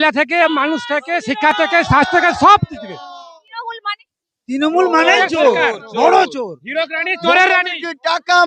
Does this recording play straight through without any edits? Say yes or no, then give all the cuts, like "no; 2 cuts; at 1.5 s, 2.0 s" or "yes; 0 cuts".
yes; 0 cuts